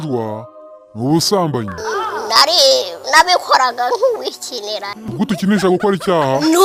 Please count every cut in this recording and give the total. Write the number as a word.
zero